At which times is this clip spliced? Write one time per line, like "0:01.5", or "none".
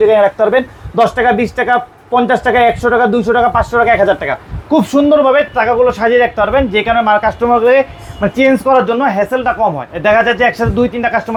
none